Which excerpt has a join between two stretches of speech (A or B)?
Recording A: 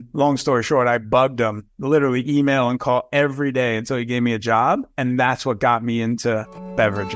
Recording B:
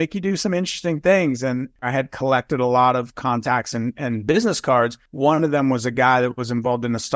B